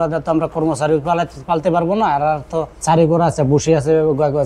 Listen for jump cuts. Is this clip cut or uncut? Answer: cut